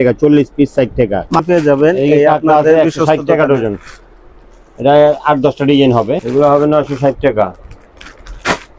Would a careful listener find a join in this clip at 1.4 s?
yes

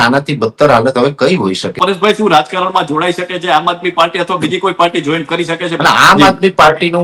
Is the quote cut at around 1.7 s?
yes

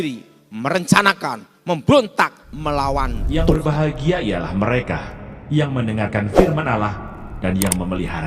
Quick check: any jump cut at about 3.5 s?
yes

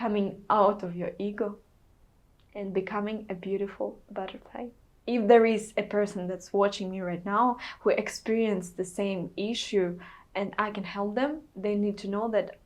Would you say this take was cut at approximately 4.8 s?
yes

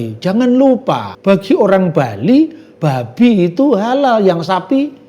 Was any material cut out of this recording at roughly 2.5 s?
no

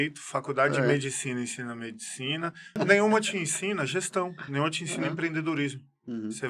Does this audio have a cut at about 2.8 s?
yes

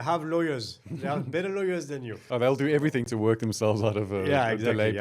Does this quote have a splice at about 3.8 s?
no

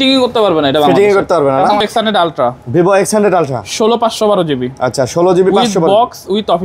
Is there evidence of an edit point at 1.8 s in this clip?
yes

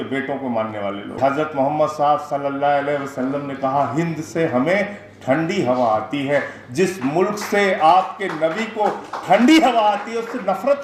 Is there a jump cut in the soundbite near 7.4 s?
no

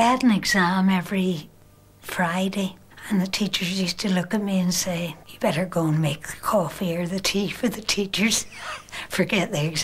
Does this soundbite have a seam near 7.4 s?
no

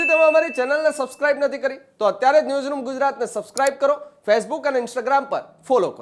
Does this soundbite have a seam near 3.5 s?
no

